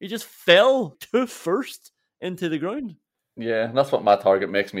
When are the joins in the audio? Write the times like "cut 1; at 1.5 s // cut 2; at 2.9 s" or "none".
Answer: cut 1; at 1.0 s